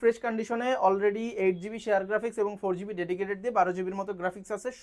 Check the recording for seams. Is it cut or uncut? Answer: uncut